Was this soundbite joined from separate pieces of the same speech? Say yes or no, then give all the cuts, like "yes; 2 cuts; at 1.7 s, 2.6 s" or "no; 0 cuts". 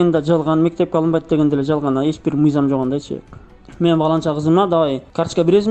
yes; 1 cut; at 3.7 s